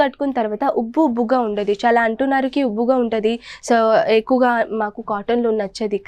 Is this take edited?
no; 0 cuts

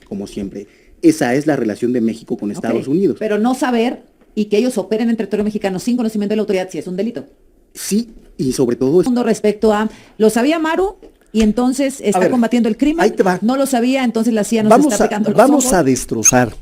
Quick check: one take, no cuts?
no; 1 cut; at 9.1 s

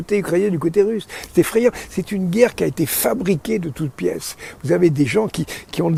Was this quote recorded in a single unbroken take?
yes; 0 cuts

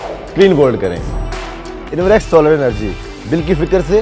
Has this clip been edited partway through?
yes; 1 cut; at 1.5 s

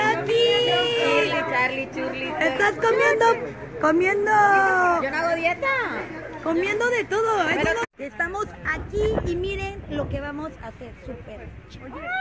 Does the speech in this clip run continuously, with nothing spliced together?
yes; 0 cuts

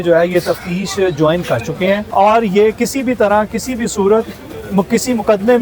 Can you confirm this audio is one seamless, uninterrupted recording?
no; 1 cut; at 2.1 s

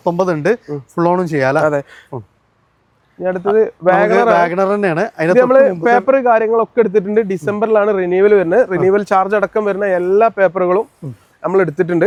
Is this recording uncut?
yes; 0 cuts

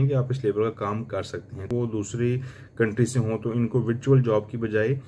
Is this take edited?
yes; 1 cut; at 1.7 s

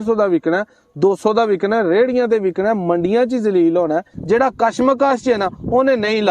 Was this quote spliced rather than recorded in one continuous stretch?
yes; 1 cut; at 4.1 s

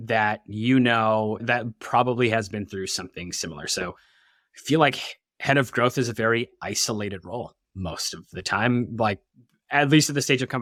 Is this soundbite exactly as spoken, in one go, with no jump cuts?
yes; 0 cuts

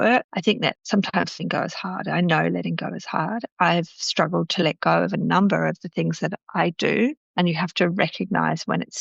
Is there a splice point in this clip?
no; 0 cuts

